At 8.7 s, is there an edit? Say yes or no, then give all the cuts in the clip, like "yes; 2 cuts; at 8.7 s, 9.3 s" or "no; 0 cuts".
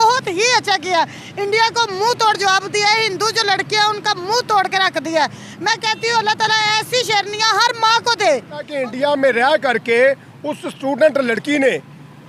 yes; 1 cut; at 8.7 s